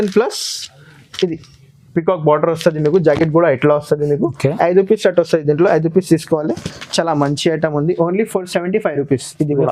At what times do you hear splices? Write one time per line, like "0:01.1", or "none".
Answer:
none